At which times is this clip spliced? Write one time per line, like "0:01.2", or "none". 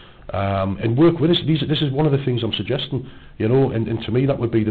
none

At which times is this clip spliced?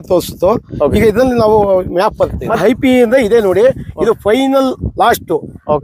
0:02.4

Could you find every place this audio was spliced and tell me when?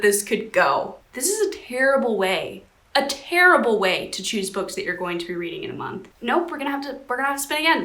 0:01.0
0:06.0

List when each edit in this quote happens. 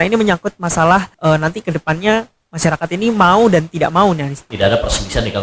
0:01.1
0:02.4
0:04.4

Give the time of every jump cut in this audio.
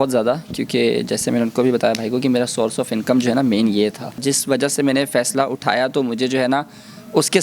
0:04.2

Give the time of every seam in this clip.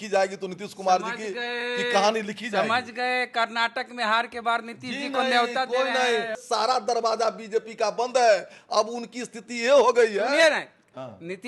0:06.4

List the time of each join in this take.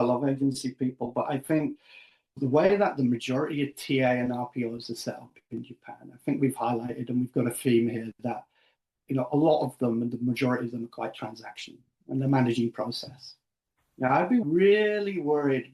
0:02.4
0:14.4

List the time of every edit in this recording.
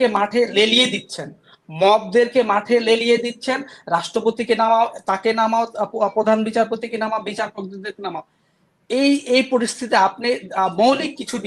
none

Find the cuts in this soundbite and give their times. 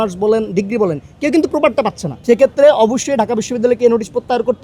0:02.1

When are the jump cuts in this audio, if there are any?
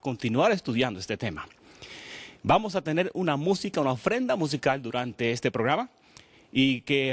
none

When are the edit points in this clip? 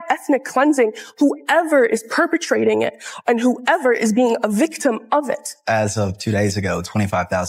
0:05.6

